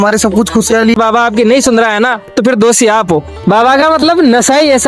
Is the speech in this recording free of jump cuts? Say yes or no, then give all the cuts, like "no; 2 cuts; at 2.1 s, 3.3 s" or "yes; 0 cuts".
no; 2 cuts; at 1.0 s, 3.3 s